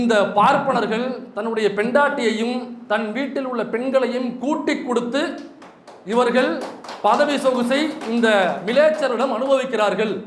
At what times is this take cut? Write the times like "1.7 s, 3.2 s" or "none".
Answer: none